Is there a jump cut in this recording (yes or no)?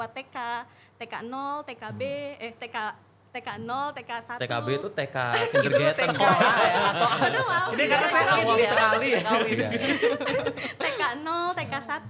no